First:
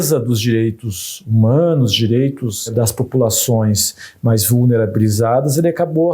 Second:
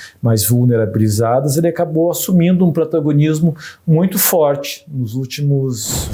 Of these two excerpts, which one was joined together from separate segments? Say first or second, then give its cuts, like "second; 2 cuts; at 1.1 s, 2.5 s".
first; 1 cut; at 2.7 s